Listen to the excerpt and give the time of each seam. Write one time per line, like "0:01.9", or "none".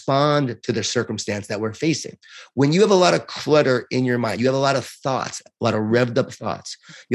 none